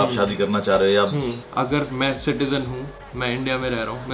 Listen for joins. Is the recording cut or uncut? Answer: cut